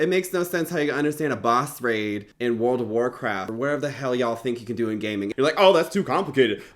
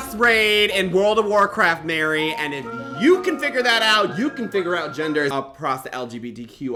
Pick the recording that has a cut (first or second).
first